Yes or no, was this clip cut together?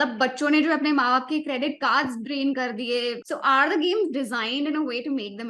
no